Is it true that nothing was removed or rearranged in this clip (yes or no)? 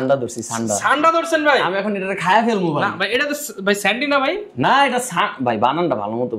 yes